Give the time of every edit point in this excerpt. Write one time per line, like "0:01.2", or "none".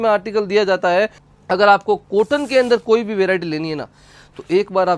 0:01.2